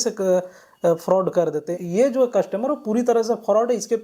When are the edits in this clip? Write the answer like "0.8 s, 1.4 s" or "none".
1.7 s